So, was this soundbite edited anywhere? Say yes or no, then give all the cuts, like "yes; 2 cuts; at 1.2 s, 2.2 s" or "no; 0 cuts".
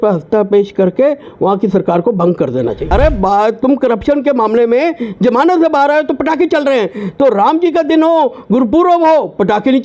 yes; 1 cut; at 2.8 s